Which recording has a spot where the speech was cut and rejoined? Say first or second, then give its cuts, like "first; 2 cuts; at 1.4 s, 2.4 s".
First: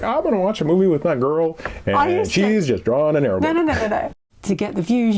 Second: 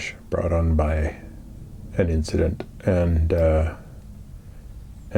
first; 1 cut; at 4.2 s